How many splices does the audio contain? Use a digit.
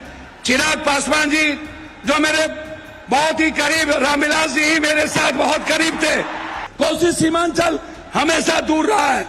1